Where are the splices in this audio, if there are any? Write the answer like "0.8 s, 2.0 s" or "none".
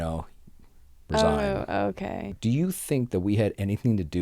2.3 s